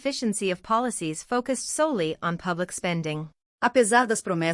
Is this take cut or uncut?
uncut